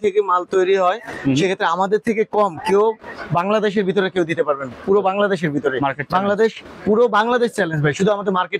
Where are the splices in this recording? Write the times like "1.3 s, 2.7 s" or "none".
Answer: none